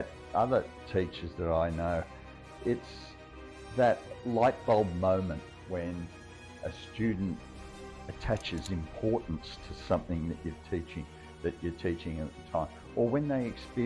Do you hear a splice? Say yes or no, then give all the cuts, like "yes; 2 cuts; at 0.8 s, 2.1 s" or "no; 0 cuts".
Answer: no; 0 cuts